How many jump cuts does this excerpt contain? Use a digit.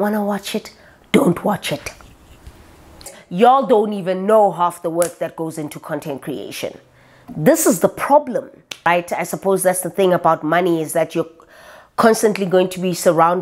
2